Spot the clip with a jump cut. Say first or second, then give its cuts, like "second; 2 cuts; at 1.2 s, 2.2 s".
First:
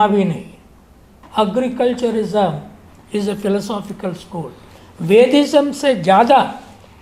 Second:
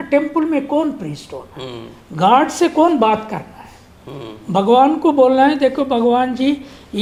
first; 1 cut; at 1.2 s